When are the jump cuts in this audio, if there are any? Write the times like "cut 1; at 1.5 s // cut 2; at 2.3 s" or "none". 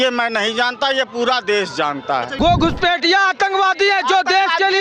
cut 1; at 2.3 s